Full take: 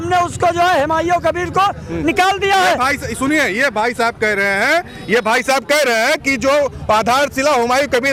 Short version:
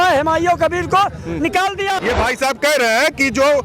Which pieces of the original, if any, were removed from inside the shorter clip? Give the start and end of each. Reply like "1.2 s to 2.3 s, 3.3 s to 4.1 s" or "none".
2.6 s to 5.0 s